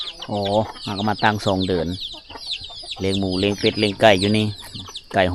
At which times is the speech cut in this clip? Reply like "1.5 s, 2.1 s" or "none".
none